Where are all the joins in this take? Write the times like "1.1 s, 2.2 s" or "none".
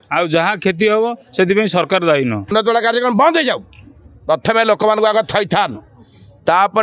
2.5 s